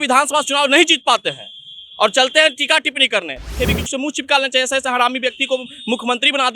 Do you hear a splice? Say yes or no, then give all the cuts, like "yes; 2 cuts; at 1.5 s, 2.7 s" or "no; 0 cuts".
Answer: yes; 1 cut; at 3.5 s